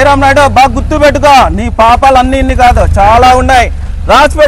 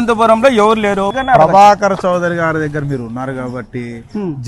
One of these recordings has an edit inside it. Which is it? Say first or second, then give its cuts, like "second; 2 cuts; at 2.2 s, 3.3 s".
second; 1 cut; at 1.1 s